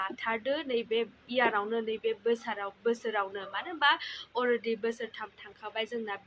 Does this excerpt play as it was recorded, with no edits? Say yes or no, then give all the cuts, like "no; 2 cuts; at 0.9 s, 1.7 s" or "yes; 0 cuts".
yes; 0 cuts